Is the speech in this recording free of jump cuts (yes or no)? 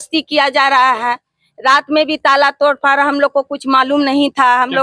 yes